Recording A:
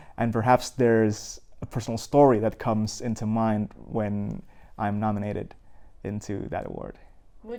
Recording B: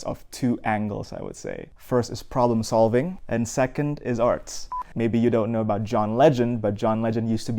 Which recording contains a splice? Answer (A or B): B